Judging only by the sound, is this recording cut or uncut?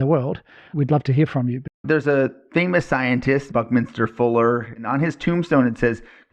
cut